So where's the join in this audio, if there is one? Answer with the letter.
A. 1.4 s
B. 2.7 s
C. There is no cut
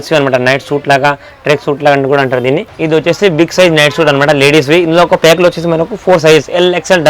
B